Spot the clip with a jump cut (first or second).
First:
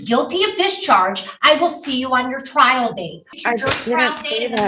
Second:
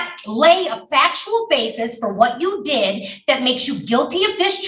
first